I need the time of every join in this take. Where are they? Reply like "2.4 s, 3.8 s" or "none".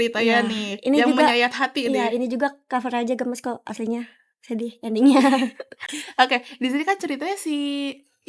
none